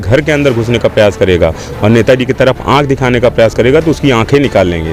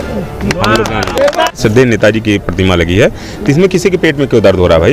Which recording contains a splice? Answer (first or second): second